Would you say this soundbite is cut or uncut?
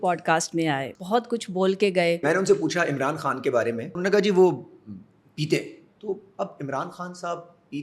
cut